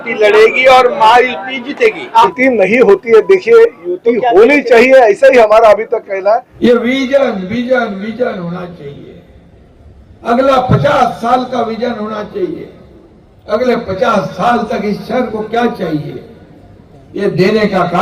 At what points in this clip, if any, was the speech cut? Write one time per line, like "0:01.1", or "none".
0:02.3
0:06.5